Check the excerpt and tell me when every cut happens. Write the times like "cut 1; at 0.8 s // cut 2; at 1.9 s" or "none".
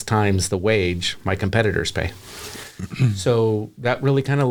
none